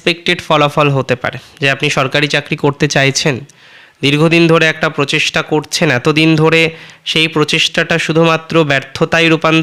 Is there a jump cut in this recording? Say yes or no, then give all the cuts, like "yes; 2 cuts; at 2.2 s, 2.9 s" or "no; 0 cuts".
no; 0 cuts